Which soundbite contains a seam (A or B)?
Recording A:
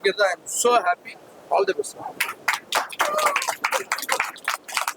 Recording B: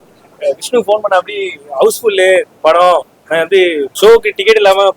B